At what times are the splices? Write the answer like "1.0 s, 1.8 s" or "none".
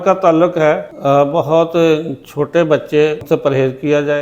0.9 s, 3.2 s

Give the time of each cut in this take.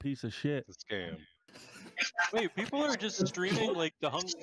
1.6 s

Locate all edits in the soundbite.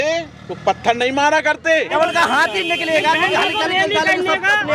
1.9 s

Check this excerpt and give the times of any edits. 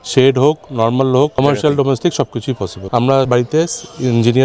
1.4 s, 3.3 s

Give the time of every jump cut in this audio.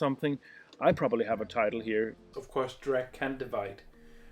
2.4 s

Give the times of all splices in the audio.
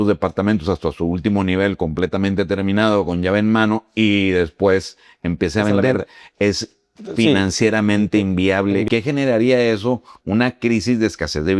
8.9 s

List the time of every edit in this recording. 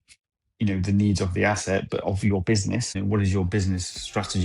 2.9 s

